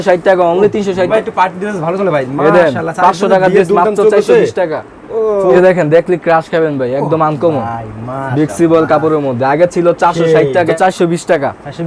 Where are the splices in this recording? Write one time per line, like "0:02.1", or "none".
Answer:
0:01.1
0:05.5
0:10.7